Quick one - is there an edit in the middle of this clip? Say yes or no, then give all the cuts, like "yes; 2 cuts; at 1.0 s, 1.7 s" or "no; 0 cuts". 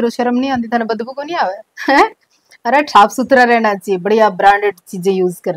no; 0 cuts